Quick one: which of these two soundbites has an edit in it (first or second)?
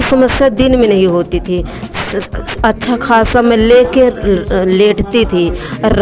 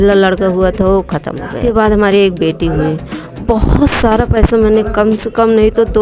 second